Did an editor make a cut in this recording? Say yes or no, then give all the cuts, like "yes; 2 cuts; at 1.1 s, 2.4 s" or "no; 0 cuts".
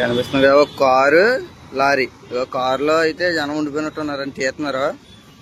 no; 0 cuts